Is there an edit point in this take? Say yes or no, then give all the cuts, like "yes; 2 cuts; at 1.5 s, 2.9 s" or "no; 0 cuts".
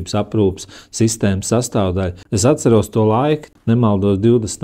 yes; 2 cuts; at 2.2 s, 3.5 s